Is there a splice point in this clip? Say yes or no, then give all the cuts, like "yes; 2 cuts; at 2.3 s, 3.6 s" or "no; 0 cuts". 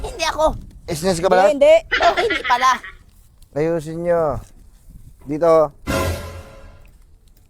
no; 0 cuts